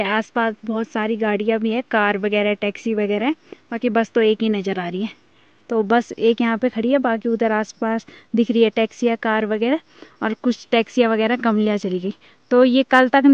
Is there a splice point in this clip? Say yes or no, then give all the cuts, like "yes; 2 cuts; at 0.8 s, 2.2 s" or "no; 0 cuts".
no; 0 cuts